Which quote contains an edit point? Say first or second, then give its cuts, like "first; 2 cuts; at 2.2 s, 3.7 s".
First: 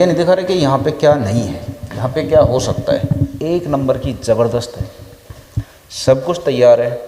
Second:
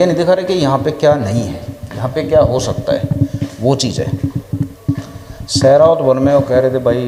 first; 1 cut; at 3.3 s